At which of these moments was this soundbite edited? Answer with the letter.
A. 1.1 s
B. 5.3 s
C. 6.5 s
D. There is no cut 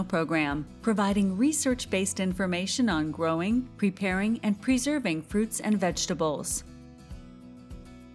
C